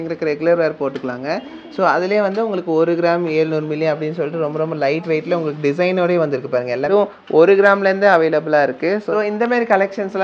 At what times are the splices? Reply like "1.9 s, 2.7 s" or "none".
6.9 s, 9.1 s